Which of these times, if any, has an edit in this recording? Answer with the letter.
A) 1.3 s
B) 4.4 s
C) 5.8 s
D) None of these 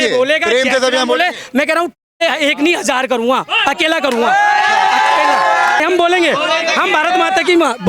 C